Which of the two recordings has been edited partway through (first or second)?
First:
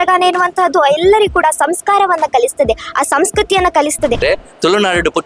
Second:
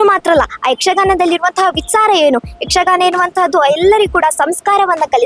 first